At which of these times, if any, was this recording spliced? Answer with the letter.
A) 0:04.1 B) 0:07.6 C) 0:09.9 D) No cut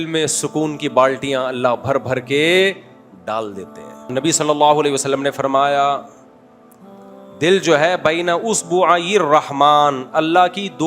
A